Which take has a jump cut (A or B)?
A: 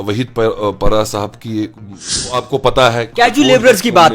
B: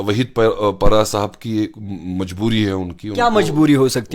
A